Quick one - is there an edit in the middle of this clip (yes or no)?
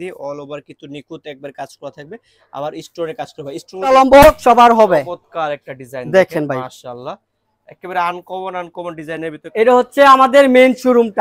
yes